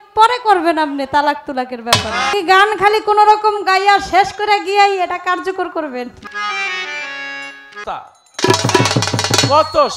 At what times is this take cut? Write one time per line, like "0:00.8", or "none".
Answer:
0:02.3
0:06.2
0:07.8